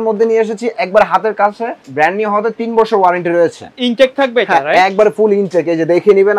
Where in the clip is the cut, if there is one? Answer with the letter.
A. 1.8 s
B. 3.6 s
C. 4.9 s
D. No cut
A